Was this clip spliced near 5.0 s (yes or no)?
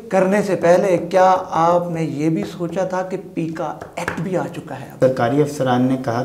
yes